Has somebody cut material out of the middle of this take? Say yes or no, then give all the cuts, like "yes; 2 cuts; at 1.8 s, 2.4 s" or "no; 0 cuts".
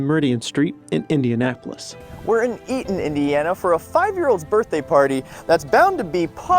yes; 1 cut; at 2.1 s